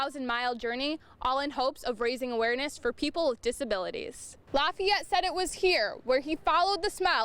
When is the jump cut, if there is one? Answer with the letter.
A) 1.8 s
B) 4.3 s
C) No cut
B